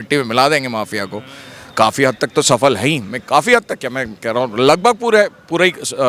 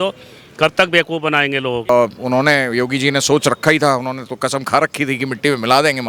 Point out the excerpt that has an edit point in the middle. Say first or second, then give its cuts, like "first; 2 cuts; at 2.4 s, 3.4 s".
second; 1 cut; at 1.9 s